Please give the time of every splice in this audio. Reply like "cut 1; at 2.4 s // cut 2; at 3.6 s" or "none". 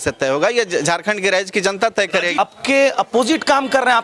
cut 1; at 2.4 s